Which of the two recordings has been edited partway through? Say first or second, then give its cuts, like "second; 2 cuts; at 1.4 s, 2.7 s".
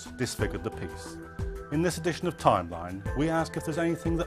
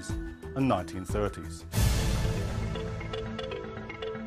first; 1 cut; at 1.8 s